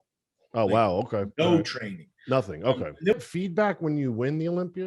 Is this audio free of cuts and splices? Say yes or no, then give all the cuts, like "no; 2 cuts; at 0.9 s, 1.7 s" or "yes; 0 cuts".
no; 1 cut; at 3.1 s